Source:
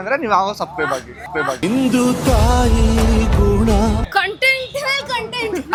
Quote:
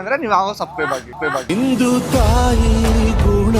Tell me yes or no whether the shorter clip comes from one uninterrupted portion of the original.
no